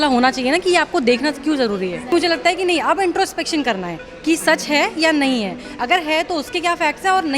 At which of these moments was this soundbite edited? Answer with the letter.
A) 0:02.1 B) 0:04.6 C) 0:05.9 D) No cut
A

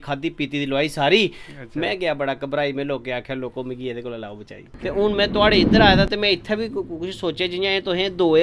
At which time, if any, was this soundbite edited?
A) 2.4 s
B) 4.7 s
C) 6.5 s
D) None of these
B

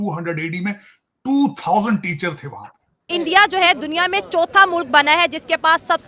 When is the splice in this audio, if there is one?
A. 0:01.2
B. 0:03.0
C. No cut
B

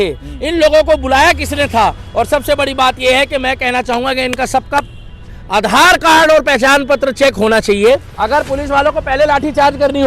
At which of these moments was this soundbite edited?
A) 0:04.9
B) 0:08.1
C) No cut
B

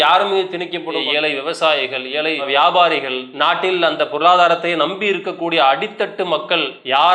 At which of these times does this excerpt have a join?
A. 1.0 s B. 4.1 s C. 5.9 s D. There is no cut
A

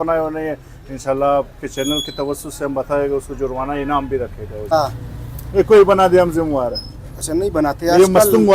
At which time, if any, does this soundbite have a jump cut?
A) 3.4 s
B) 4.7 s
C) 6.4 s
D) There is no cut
B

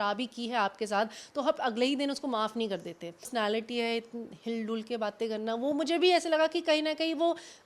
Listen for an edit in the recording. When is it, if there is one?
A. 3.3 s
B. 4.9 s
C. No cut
A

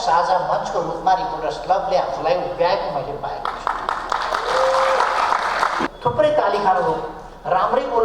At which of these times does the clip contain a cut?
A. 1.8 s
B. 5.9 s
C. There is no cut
B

